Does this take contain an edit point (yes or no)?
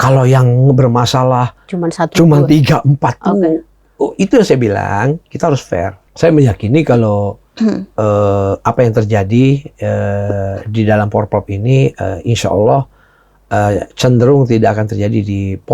yes